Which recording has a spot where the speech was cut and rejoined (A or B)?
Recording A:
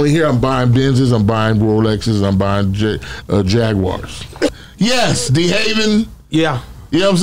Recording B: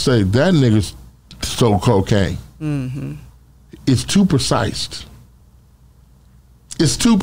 A